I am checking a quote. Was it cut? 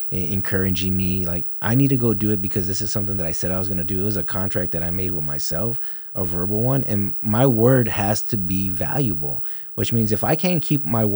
no; 0 cuts

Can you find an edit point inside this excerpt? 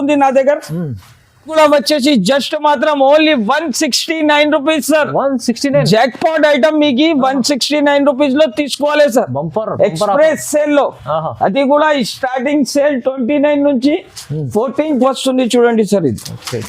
yes; 2 cuts; at 1.5 s, 15.0 s

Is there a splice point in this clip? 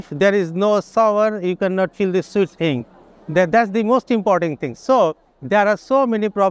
no; 0 cuts

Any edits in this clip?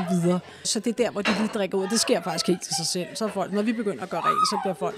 no; 0 cuts

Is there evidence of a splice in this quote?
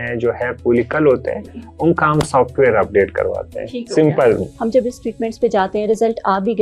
no; 0 cuts

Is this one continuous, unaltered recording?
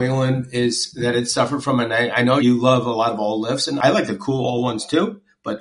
no; 2 cuts; at 2.4 s, 3.8 s

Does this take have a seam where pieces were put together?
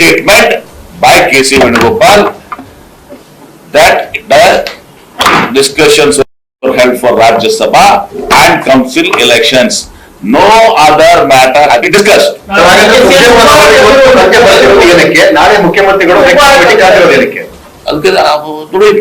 yes; 1 cut; at 15.8 s

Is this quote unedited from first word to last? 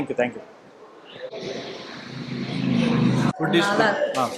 yes; 0 cuts

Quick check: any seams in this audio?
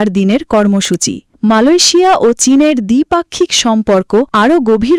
no; 0 cuts

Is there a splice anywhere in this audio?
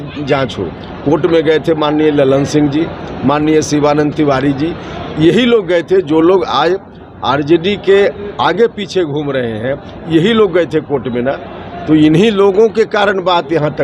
no; 0 cuts

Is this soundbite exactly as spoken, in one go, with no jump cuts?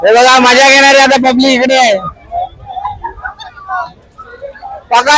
yes; 0 cuts

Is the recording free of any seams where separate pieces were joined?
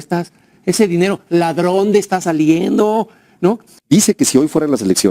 no; 1 cut; at 3.7 s

